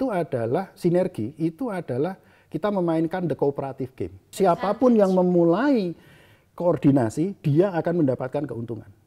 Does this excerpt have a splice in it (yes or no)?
yes